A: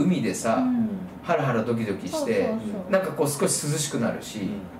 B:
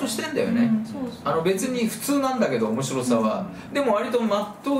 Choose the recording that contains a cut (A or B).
B